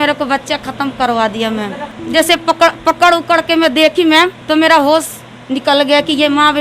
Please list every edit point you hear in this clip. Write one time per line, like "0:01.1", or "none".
0:01.9